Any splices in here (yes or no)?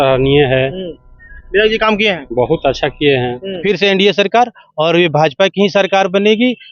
yes